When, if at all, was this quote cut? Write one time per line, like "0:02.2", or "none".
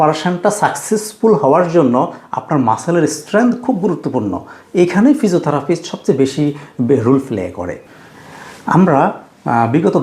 0:07.8